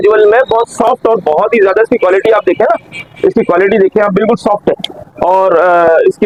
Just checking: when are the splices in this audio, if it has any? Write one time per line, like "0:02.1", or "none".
none